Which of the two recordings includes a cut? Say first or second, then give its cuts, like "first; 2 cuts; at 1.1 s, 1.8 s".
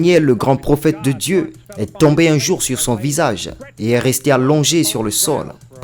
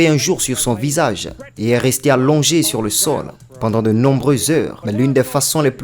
second; 1 cut; at 4.8 s